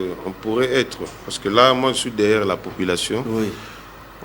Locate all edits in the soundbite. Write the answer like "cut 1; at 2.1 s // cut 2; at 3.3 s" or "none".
none